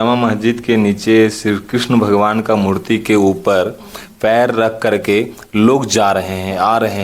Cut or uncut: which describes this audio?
uncut